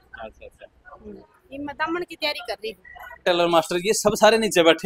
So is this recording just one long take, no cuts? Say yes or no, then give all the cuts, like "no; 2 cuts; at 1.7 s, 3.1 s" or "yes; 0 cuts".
no; 1 cut; at 3.2 s